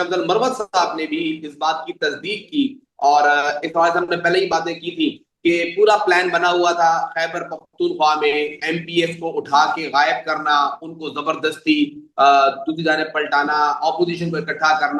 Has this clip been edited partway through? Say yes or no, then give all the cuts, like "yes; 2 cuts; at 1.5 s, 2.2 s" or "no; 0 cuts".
no; 0 cuts